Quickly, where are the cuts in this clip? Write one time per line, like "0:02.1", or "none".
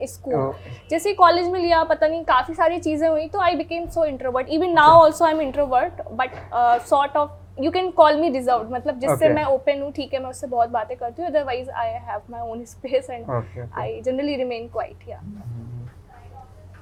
none